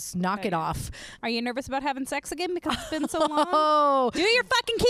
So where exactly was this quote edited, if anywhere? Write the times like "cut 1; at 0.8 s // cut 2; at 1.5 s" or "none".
cut 1; at 1.1 s

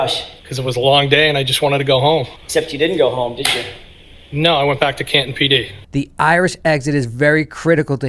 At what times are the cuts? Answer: cut 1; at 2.4 s // cut 2; at 5.8 s

